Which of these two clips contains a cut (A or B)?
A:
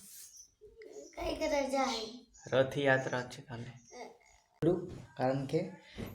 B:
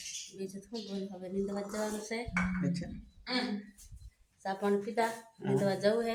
A